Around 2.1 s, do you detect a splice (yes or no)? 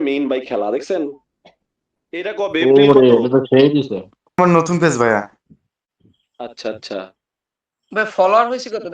no